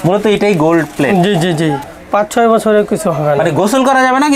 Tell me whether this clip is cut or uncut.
cut